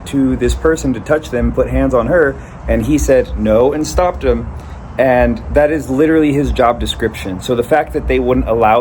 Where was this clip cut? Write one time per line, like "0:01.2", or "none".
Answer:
none